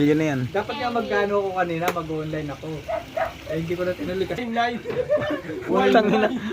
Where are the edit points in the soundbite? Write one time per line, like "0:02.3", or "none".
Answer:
0:01.0